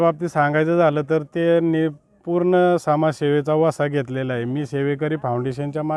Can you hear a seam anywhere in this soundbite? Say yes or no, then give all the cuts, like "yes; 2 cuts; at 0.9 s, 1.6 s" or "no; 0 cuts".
no; 0 cuts